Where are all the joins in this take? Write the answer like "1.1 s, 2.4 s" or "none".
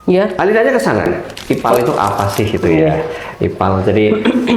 1.3 s